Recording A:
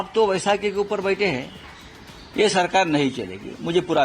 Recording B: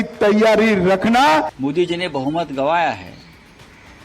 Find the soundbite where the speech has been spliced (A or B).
B